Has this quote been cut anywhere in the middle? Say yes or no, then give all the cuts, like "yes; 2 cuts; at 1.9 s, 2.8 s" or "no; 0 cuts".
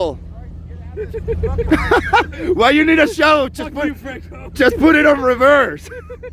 no; 0 cuts